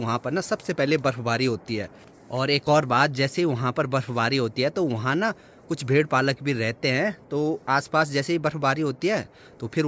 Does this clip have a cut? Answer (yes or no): no